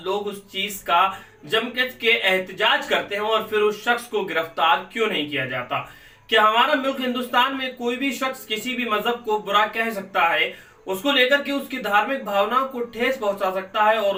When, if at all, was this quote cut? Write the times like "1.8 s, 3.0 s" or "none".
none